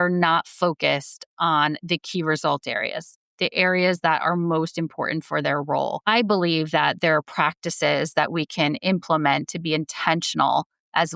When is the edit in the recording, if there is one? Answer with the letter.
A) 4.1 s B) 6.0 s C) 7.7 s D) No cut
B